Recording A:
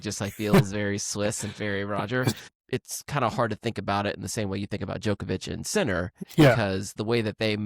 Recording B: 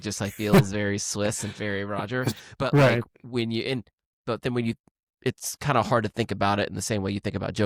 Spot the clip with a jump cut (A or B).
A